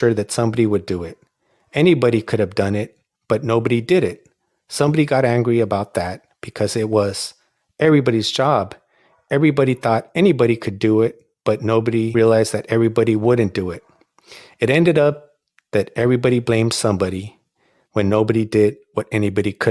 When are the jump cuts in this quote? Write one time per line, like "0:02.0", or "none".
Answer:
0:12.1